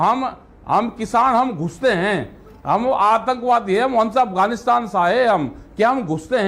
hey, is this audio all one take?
yes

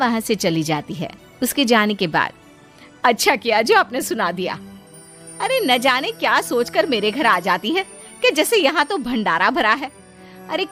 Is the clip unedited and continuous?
yes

